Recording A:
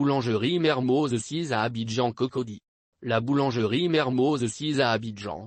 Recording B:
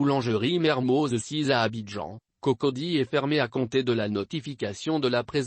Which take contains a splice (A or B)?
B